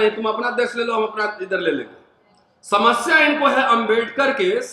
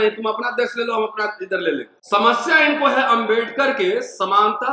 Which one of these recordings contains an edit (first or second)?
second